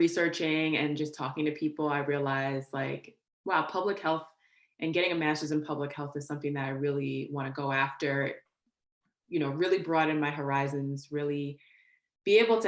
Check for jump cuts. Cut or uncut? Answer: uncut